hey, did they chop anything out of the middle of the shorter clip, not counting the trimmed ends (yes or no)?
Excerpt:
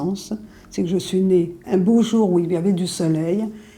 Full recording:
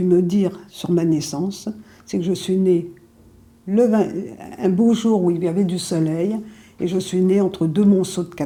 yes